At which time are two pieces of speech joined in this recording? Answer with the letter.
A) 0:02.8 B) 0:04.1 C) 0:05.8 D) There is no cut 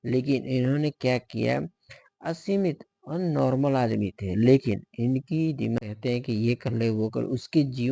C